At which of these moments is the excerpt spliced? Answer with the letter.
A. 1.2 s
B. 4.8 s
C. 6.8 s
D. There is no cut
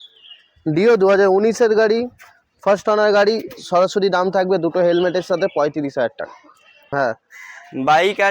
C